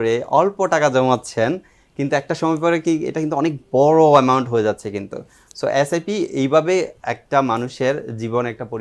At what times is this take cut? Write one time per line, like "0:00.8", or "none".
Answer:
none